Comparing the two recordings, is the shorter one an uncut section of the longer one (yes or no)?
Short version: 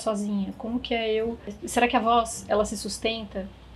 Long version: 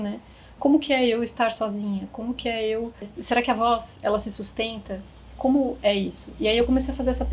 yes